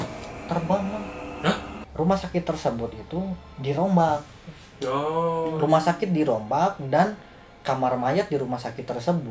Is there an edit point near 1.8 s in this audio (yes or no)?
yes